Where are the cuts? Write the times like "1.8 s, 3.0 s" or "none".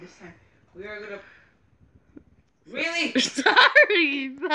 2.6 s